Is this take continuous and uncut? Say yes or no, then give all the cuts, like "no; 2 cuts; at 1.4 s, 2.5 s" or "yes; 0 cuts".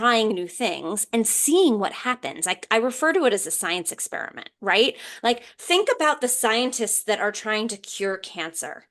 yes; 0 cuts